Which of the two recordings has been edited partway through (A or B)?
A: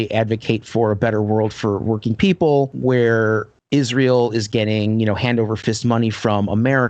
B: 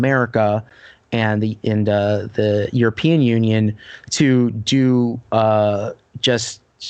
A